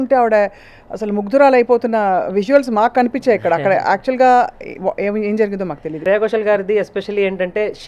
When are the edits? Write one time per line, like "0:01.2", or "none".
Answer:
0:06.0